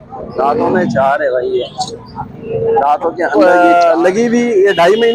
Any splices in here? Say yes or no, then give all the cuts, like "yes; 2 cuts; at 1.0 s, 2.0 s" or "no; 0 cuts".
yes; 1 cut; at 3.3 s